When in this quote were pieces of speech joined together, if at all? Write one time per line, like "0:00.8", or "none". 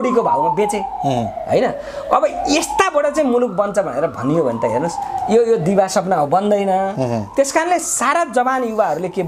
none